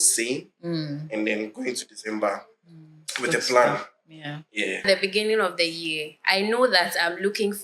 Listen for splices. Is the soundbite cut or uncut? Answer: cut